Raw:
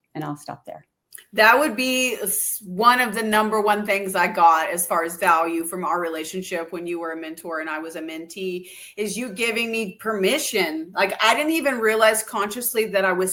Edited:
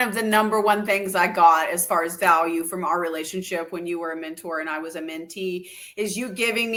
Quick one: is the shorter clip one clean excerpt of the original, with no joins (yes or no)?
yes